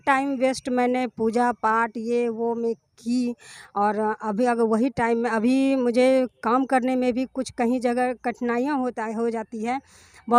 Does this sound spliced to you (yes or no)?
no